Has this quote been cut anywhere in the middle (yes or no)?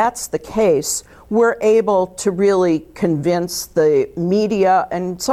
no